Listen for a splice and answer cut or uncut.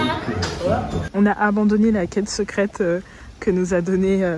cut